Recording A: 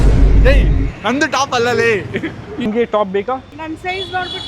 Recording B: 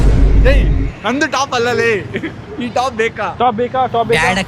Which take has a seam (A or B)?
A